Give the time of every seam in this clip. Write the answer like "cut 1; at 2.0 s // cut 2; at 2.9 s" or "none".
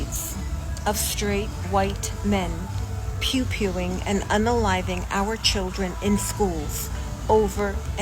none